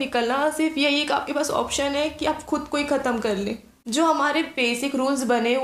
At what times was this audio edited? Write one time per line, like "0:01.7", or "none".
0:03.7